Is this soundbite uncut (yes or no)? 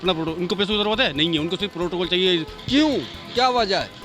no